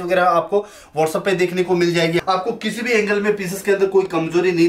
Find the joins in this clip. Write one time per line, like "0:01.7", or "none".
0:02.2